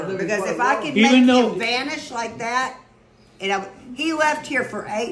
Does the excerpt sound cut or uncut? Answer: uncut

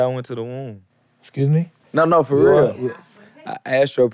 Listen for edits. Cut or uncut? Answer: cut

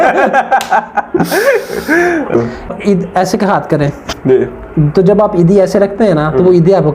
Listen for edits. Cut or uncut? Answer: cut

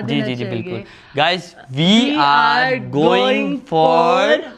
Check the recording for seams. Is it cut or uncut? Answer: uncut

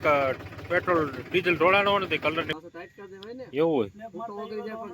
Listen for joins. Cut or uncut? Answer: cut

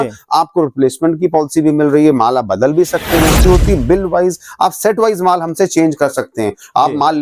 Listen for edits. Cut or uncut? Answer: cut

